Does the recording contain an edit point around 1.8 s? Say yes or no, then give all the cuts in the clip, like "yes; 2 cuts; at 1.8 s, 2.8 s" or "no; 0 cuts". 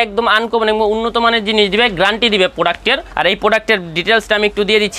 no; 1 cut; at 3.1 s